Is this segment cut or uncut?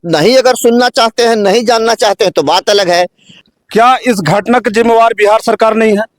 cut